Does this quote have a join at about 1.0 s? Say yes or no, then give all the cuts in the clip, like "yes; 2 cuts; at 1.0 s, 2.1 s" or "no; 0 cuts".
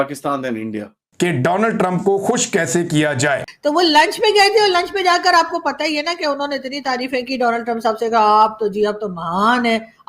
yes; 1 cut; at 1.0 s